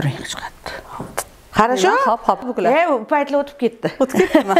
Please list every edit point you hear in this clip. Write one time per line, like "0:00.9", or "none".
0:02.5